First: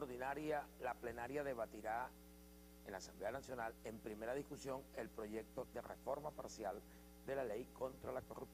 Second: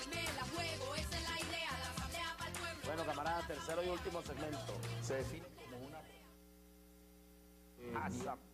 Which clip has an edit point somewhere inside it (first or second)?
first